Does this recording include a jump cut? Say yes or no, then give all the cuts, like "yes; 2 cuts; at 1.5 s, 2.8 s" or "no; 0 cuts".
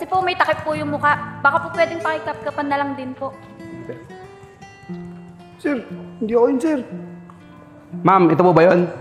no; 0 cuts